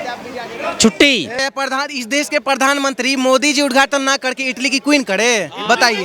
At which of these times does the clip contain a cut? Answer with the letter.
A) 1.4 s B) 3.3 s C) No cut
A